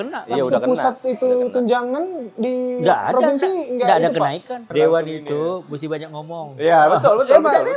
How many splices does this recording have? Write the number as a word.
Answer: one